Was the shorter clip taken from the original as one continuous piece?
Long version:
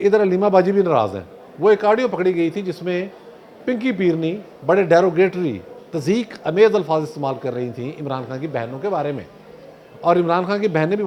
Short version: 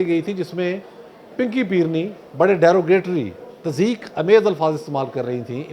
yes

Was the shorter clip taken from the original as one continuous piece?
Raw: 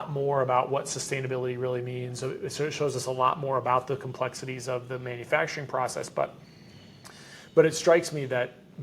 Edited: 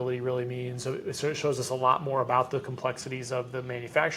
yes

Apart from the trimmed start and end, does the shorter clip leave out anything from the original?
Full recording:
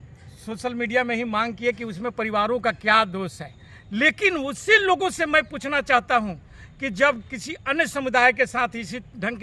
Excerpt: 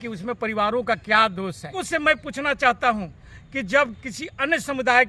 yes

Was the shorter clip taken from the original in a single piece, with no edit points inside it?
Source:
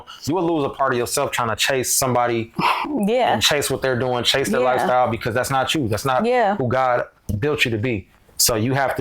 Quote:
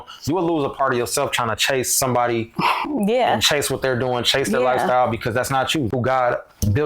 no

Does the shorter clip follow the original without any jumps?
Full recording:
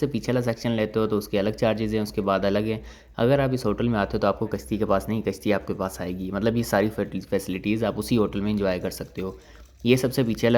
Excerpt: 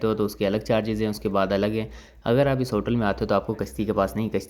yes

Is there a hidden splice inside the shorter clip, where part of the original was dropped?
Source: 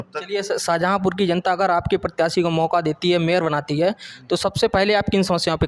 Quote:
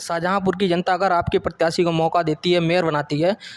no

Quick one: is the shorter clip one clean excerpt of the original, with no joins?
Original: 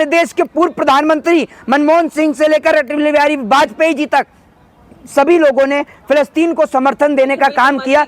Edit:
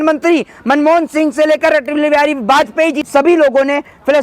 no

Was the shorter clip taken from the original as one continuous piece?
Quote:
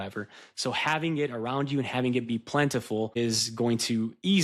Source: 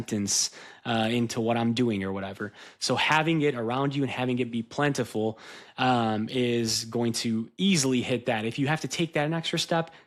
no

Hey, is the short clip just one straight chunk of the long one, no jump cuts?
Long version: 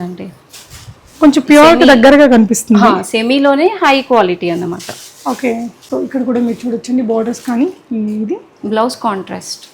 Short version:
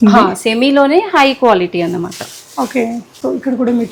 yes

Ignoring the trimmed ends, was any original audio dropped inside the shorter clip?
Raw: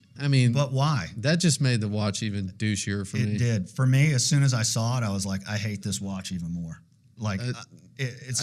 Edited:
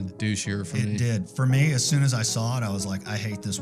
no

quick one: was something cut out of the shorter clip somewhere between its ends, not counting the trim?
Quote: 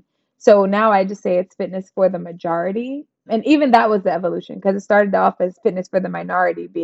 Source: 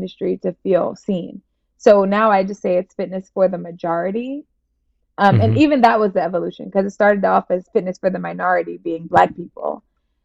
yes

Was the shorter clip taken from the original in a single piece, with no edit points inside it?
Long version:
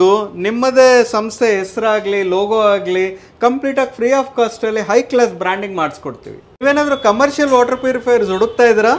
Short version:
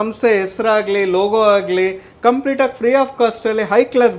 yes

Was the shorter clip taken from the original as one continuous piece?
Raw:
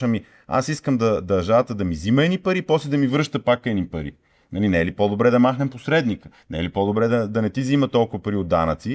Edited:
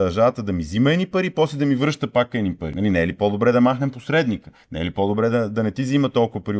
no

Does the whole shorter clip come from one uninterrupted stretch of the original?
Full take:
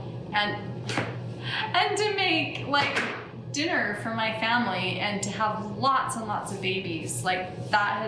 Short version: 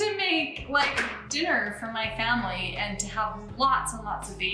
no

